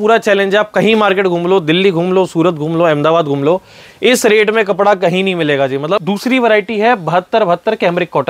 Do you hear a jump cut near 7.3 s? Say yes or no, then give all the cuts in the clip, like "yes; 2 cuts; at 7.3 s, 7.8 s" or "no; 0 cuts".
no; 1 cut; at 6.0 s